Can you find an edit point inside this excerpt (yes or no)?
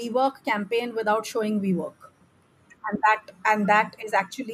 no